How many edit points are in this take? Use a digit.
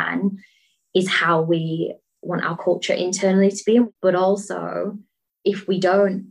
1